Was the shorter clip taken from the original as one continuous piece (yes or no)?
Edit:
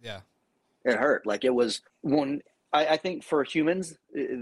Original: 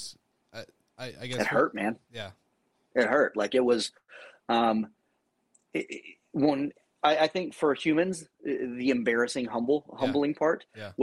no